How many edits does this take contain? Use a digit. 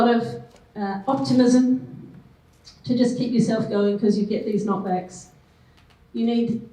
0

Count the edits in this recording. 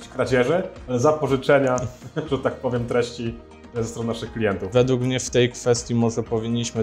1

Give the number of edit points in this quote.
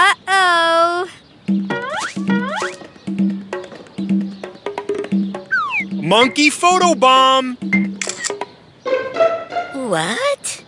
1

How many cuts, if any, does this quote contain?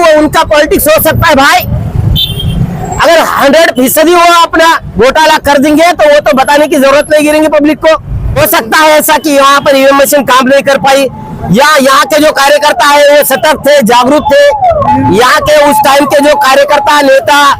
1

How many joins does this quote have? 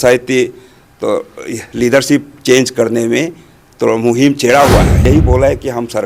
1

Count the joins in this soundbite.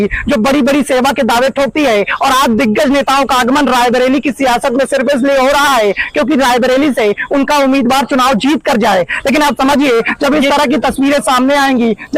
0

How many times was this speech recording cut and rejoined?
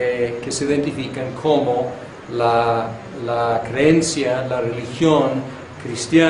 0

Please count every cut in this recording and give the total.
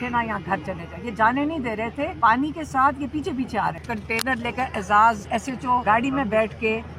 3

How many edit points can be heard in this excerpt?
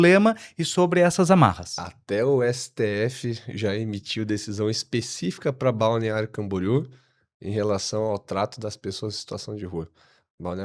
0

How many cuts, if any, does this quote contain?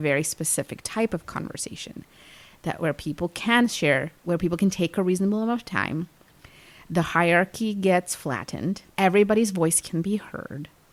0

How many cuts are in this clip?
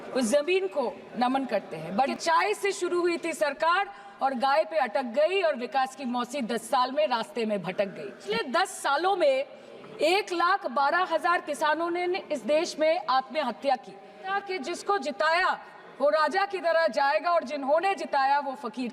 3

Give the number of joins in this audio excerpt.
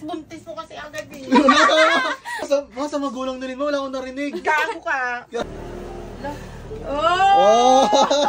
2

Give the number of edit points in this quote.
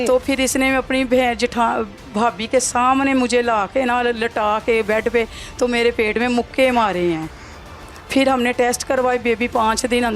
0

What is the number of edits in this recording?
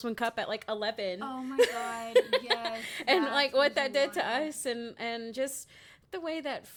0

